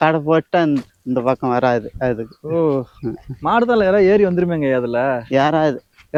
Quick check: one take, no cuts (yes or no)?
yes